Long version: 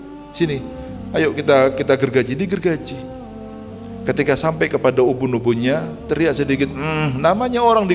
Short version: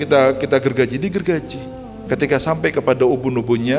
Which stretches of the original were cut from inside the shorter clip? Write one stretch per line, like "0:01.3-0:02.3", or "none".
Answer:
0:03.2-0:03.8